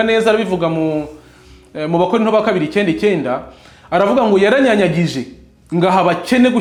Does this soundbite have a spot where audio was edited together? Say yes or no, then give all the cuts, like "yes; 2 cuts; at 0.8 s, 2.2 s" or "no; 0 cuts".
no; 0 cuts